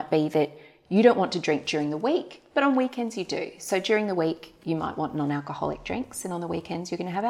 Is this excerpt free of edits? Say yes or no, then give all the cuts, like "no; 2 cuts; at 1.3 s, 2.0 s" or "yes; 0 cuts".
yes; 0 cuts